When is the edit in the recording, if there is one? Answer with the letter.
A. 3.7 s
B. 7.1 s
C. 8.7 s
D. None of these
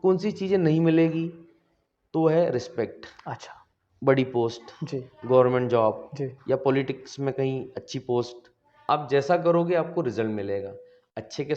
C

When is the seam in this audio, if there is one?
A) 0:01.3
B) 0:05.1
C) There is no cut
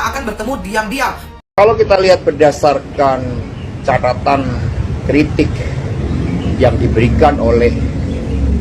A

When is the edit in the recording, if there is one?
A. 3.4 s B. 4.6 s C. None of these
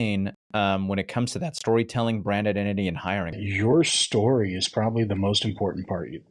A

